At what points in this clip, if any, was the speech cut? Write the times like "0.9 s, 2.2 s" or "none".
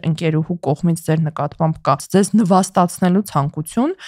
2.0 s, 3.3 s